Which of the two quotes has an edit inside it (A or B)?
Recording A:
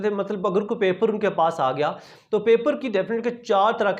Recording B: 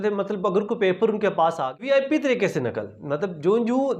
B